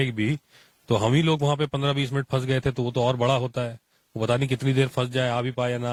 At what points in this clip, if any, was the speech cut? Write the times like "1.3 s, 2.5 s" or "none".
none